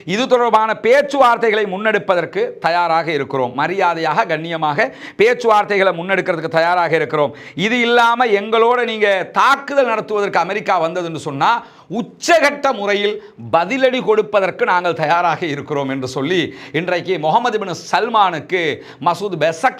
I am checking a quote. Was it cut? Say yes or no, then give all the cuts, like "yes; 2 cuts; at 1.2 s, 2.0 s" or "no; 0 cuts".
no; 0 cuts